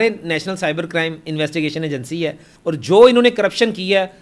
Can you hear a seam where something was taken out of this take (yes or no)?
yes